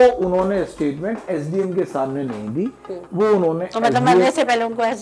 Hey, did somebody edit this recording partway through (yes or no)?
no